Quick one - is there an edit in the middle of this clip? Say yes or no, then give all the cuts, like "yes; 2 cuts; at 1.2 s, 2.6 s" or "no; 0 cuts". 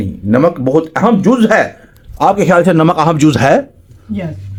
no; 0 cuts